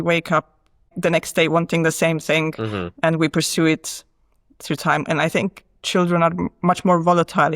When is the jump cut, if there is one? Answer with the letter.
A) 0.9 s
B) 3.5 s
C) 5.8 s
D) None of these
A